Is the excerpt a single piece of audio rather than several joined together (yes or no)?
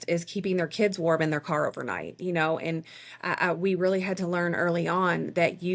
yes